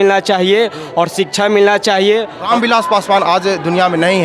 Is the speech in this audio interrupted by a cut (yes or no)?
yes